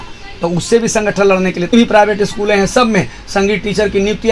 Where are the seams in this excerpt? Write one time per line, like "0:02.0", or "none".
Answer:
0:01.7